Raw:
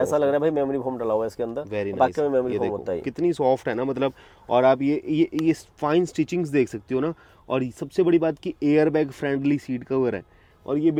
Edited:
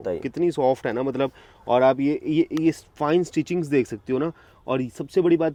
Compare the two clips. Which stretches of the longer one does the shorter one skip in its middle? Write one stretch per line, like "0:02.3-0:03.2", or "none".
none